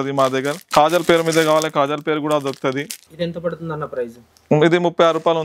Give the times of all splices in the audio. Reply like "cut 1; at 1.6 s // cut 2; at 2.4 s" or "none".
cut 1; at 2.8 s